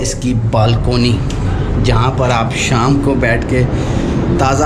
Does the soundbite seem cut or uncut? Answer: uncut